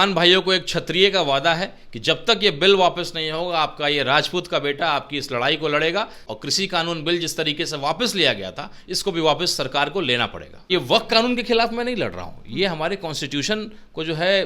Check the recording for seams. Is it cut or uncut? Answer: cut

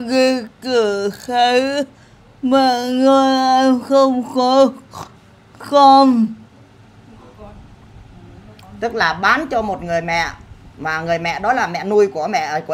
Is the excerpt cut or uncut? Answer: uncut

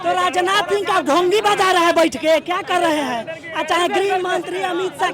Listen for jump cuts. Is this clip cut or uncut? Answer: uncut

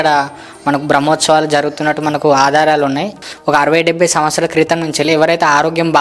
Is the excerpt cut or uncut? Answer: cut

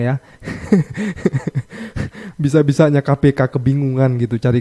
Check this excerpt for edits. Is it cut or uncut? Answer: uncut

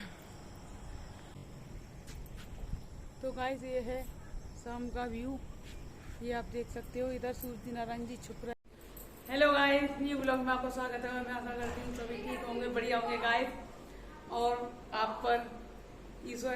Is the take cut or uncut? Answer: cut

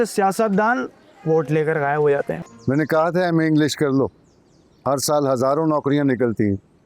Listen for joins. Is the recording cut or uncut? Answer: cut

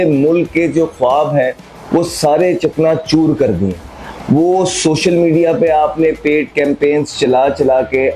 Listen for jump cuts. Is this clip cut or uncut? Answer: uncut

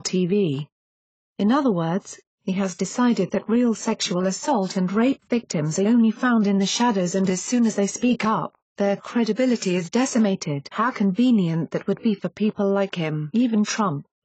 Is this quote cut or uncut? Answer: cut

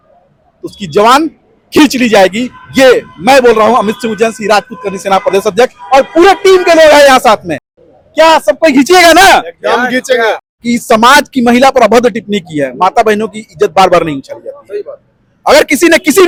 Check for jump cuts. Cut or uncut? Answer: uncut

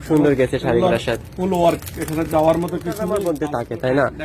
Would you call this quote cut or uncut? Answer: cut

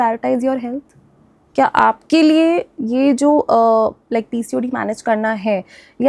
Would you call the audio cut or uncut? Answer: uncut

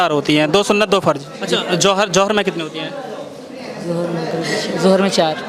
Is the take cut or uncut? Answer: cut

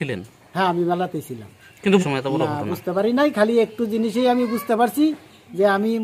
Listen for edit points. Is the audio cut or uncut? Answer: cut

